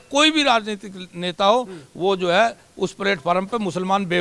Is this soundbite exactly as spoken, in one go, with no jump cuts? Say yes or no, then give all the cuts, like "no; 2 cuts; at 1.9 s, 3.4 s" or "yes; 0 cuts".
yes; 0 cuts